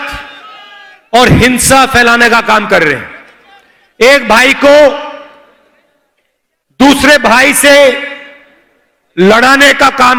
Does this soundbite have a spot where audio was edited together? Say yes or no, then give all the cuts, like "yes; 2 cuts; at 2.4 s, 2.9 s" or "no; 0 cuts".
no; 0 cuts